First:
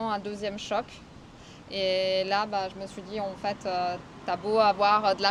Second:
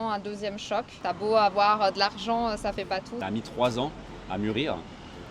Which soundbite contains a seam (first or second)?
second